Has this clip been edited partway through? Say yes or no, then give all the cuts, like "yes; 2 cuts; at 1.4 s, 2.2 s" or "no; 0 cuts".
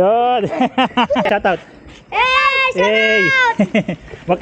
yes; 1 cut; at 1.3 s